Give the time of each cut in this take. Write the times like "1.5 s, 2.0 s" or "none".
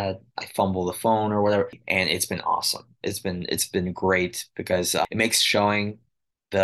1.8 s